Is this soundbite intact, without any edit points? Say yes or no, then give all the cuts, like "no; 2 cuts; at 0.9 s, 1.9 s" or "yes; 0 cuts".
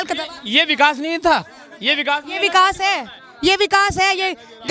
yes; 0 cuts